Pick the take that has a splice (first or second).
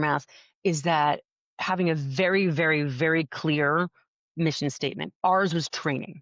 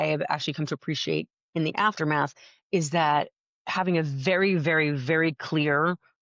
first